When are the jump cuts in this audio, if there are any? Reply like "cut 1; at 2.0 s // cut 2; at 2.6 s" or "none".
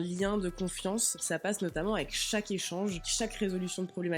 cut 1; at 1.2 s // cut 2; at 3.1 s